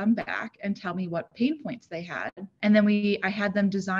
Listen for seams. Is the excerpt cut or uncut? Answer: cut